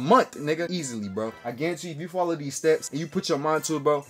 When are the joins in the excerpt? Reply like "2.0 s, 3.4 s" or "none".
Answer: 0.9 s, 3.0 s